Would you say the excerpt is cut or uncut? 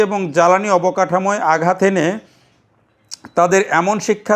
uncut